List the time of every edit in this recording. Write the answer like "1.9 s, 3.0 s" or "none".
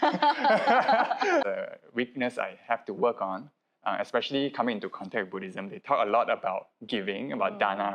1.5 s